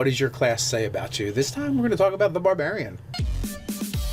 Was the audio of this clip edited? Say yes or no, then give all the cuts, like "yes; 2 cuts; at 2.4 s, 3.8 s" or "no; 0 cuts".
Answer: no; 0 cuts